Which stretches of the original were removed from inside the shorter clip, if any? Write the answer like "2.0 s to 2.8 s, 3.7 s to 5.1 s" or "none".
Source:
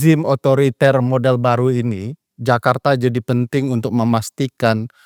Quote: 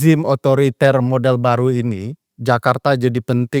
none